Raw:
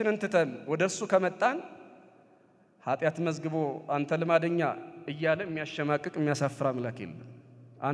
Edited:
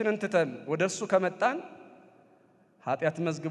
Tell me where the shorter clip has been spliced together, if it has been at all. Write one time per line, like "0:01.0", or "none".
none